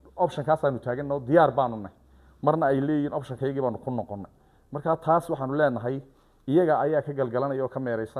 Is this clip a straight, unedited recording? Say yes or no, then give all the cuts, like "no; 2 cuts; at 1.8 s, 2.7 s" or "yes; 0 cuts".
yes; 0 cuts